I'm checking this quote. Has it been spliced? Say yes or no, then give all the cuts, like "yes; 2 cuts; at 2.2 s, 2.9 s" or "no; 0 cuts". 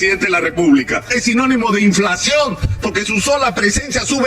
yes; 1 cut; at 1.1 s